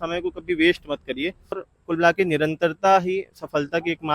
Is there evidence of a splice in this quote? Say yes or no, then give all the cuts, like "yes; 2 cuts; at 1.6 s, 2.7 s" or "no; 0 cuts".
yes; 1 cut; at 1.7 s